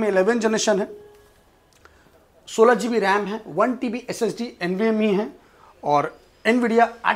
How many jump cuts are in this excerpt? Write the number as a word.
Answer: zero